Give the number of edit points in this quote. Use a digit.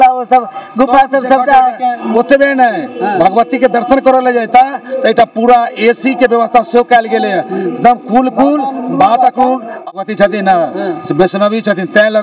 1